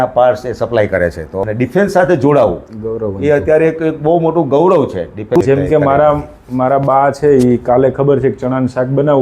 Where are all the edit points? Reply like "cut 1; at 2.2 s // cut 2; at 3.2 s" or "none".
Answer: cut 1; at 1.3 s // cut 2; at 5.4 s